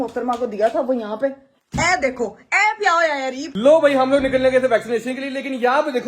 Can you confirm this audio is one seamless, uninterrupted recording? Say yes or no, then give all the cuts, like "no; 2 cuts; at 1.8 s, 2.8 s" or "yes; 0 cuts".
no; 1 cut; at 3.5 s